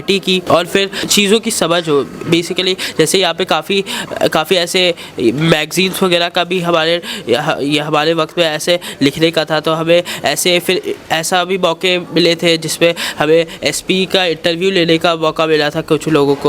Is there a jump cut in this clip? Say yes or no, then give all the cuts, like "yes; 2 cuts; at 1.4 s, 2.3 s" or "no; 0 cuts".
no; 0 cuts